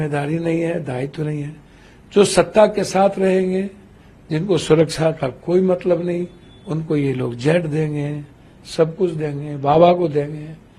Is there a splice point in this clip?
no; 0 cuts

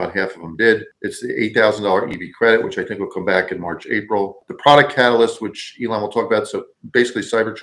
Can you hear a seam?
yes; 2 cuts; at 0.9 s, 4.4 s

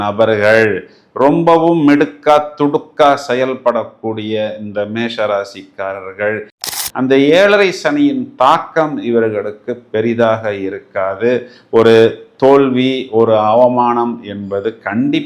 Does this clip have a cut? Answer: yes; 1 cut; at 6.8 s

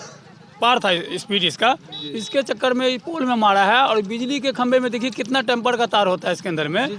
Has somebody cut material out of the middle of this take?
no; 0 cuts

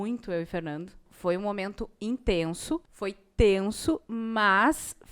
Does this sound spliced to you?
yes; 2 cuts; at 1.0 s, 2.9 s

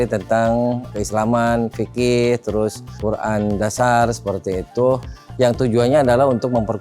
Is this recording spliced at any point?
no; 0 cuts

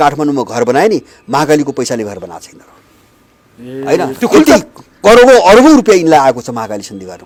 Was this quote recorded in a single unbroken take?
yes; 0 cuts

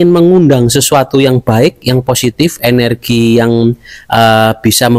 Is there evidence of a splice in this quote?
no; 0 cuts

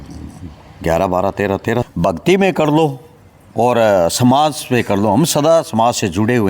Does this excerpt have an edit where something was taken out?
yes; 1 cut; at 1.9 s

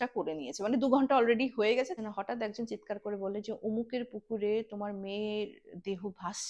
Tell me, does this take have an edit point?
yes; 1 cut; at 1.9 s

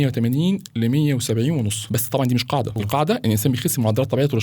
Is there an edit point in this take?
yes; 2 cuts; at 1.8 s, 2.7 s

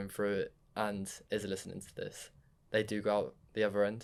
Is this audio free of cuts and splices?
yes; 0 cuts

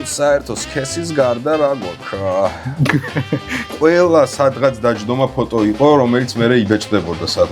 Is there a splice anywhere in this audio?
yes; 1 cut; at 3.7 s

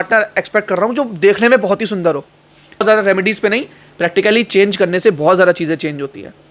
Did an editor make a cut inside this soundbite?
yes; 1 cut; at 2.8 s

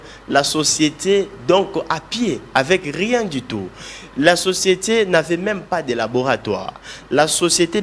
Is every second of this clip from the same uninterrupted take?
yes; 0 cuts

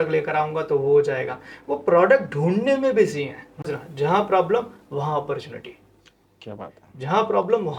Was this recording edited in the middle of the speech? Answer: yes; 1 cut; at 3.7 s

